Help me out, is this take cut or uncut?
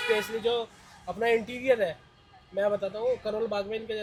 uncut